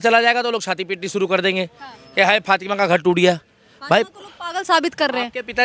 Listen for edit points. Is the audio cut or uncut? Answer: uncut